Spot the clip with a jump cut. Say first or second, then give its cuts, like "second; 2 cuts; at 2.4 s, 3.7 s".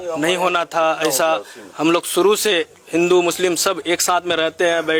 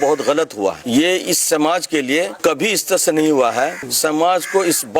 second; 3 cuts; at 0.8 s, 2.4 s, 3.8 s